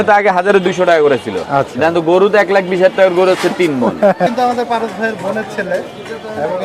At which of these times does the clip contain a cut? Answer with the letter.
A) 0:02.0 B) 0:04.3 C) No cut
B